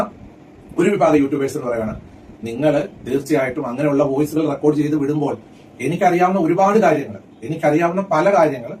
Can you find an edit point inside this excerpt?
no; 0 cuts

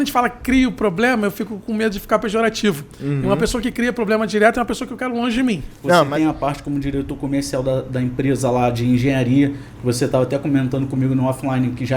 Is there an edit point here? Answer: yes; 1 cut; at 6.1 s

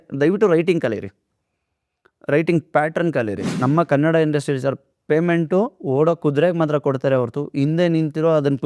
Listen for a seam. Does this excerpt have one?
yes; 1 cut; at 3.5 s

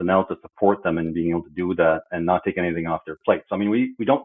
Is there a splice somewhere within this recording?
no; 0 cuts

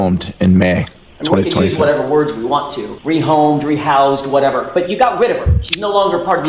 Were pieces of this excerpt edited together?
no; 0 cuts

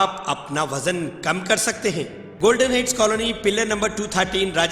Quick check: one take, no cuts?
no; 1 cut; at 2.2 s

